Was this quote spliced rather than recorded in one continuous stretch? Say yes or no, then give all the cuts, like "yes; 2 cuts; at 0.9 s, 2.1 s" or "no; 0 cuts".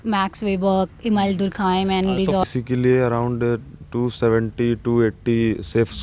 no; 0 cuts